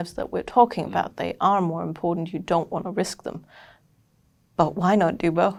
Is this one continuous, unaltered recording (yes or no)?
yes